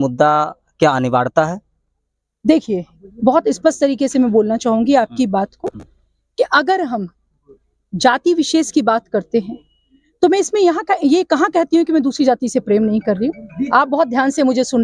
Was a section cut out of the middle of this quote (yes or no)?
no